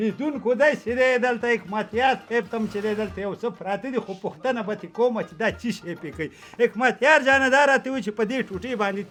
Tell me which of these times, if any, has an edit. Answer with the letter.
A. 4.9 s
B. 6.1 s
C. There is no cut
C